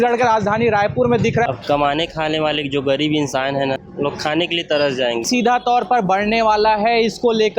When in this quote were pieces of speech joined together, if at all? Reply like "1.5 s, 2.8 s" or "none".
1.4 s, 3.9 s, 5.3 s